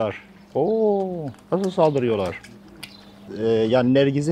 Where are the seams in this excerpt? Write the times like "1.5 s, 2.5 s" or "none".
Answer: 3.2 s